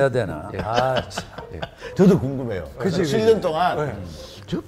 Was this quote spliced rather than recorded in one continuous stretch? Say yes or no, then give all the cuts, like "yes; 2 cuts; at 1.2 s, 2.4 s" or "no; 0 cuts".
yes; 1 cut; at 1.8 s